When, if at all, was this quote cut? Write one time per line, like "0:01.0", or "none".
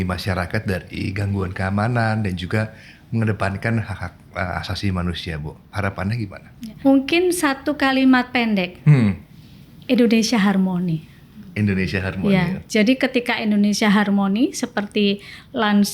0:06.7